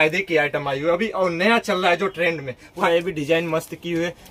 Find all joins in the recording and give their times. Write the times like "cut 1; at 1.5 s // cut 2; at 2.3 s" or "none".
cut 1; at 2.8 s